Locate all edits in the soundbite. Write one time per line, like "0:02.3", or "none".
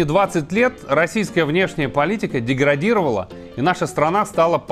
none